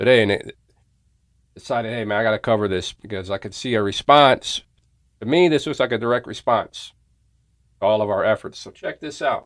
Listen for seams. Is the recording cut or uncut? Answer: uncut